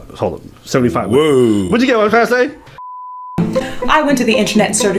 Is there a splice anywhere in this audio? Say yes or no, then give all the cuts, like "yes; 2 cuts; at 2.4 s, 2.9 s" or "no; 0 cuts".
yes; 1 cut; at 3.0 s